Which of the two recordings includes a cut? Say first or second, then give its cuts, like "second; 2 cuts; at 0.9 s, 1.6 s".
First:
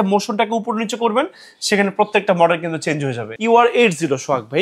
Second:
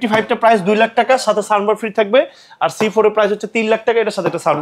first; 1 cut; at 3.2 s